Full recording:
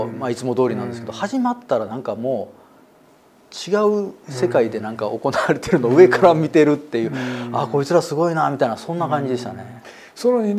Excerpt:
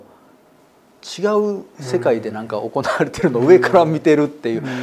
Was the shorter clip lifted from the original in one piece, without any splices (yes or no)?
yes